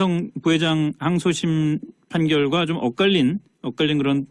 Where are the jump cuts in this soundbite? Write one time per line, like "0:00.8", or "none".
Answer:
none